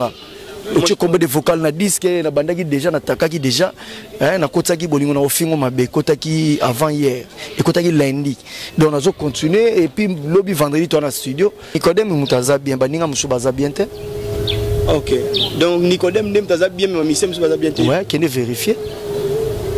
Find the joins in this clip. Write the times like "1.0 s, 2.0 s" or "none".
11.8 s

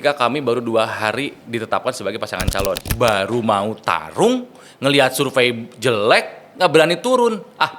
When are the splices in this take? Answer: 2.8 s

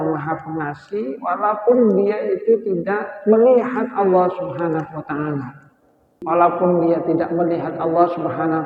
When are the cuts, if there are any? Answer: 6.1 s

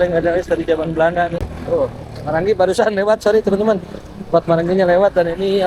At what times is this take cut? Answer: 1.4 s

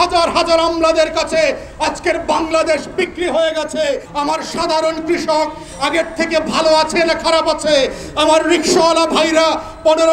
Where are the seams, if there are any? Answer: 4.1 s

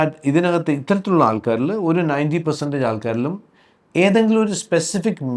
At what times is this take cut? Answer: none

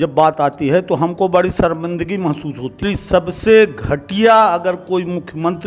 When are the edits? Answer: 2.8 s

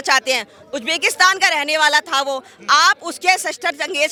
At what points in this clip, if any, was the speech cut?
none

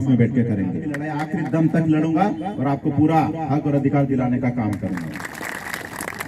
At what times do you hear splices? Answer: 1.1 s, 5.4 s

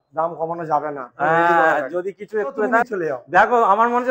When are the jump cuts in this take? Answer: 2.8 s

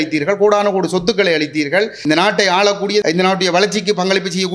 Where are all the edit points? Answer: 2.0 s, 3.0 s

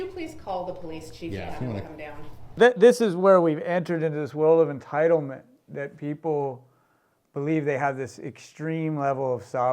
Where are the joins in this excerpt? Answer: 2.4 s

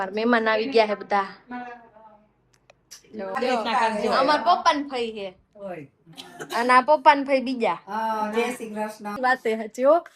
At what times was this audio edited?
3.4 s, 9.1 s

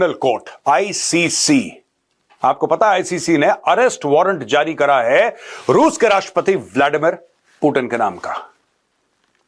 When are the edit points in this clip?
none

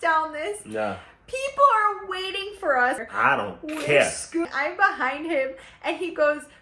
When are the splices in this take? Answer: 3.0 s, 4.5 s

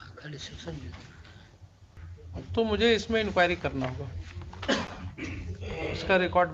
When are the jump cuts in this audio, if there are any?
2.0 s

